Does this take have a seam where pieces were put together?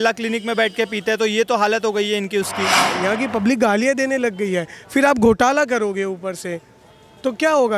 yes; 1 cut; at 2.9 s

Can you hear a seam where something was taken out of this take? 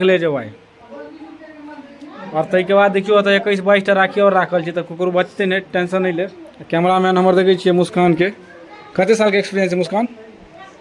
no; 0 cuts

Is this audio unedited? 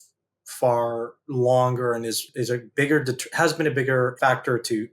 no; 3 cuts; at 1.2 s, 2.2 s, 4.1 s

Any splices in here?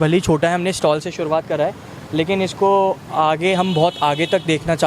no; 0 cuts

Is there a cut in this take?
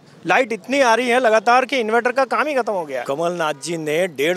yes; 1 cut; at 3.0 s

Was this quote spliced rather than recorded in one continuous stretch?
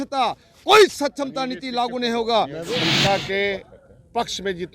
yes; 1 cut; at 2.8 s

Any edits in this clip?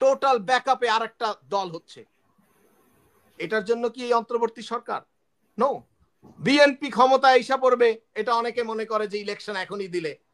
no; 0 cuts

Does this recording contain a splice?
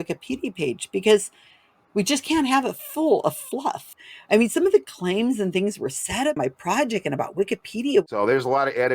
yes; 3 cuts; at 3.9 s, 6.3 s, 8.1 s

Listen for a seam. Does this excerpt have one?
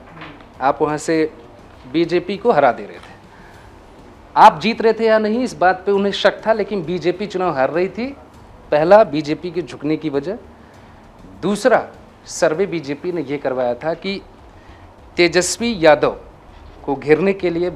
no; 0 cuts

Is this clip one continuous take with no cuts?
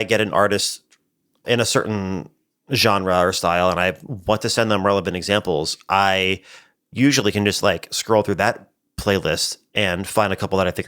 no; 1 cut; at 1.4 s

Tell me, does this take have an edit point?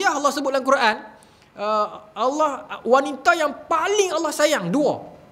no; 0 cuts

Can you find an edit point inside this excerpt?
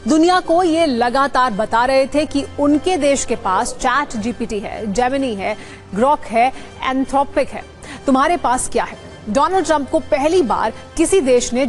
no; 0 cuts

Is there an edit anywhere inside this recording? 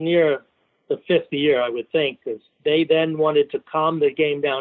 yes; 1 cut; at 2.6 s

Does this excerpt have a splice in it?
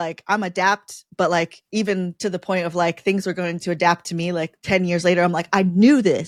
no; 0 cuts

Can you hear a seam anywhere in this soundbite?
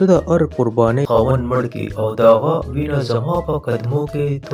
yes; 1 cut; at 1.1 s

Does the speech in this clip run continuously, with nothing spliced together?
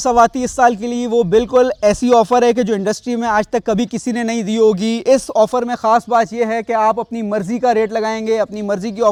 yes; 0 cuts

